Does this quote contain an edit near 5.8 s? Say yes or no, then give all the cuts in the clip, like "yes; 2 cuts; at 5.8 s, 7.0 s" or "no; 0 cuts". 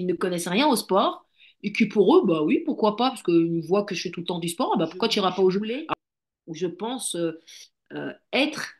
yes; 1 cut; at 5.8 s